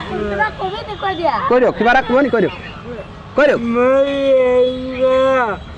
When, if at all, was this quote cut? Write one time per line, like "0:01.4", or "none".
none